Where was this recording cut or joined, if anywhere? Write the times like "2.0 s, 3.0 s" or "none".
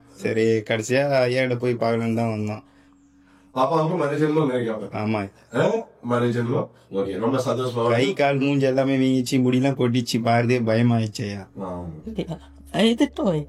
12.1 s